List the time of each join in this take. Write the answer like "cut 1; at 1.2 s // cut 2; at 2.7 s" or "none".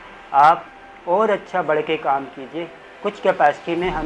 none